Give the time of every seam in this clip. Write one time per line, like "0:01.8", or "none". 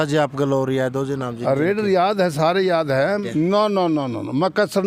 0:03.2